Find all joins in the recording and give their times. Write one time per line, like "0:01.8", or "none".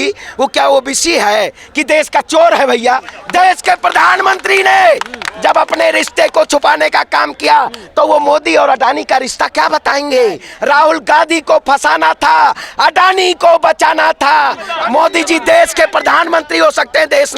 0:03.1
0:10.5
0:14.6